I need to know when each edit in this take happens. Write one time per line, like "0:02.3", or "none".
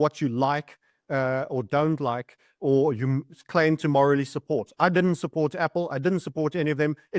none